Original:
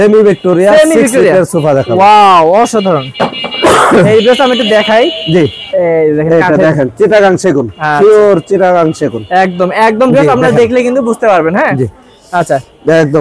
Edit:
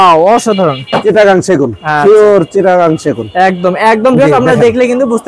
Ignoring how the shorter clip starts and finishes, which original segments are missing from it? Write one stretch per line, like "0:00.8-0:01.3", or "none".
0:03.3-0:06.9